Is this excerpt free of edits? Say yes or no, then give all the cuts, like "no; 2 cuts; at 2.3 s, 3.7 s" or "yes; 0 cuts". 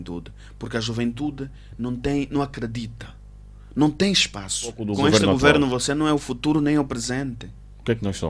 no; 1 cut; at 4.8 s